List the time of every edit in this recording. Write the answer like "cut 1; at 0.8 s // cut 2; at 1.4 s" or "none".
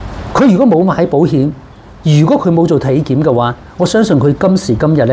none